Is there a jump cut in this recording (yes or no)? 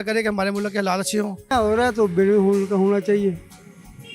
yes